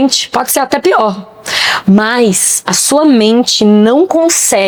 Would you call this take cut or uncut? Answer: uncut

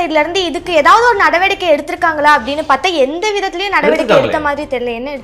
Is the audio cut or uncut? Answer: uncut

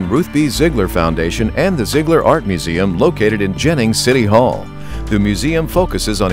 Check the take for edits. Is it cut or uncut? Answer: uncut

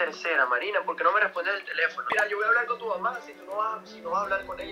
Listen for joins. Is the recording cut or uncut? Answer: cut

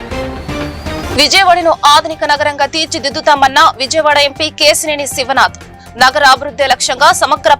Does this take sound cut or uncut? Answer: cut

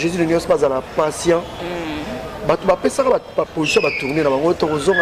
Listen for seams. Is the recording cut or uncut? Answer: uncut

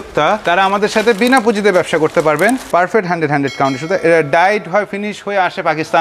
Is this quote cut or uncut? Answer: cut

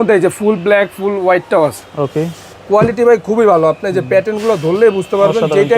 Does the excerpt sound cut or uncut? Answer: uncut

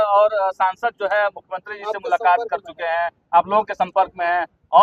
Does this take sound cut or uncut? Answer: uncut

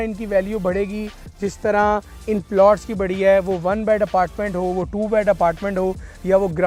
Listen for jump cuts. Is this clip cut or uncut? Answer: uncut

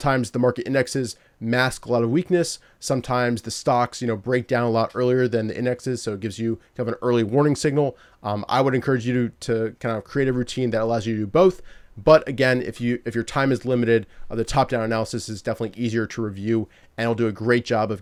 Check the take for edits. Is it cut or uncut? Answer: uncut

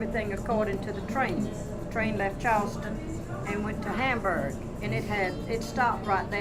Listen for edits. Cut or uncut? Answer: uncut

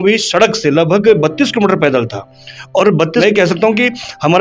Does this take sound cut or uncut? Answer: cut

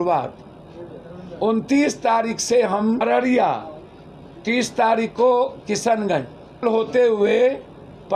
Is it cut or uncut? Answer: cut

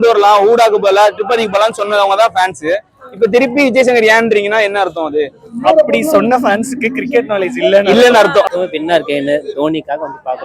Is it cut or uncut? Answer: cut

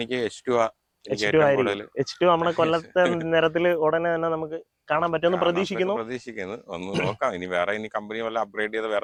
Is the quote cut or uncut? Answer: uncut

